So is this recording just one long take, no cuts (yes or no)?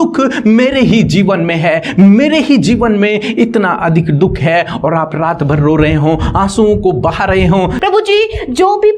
no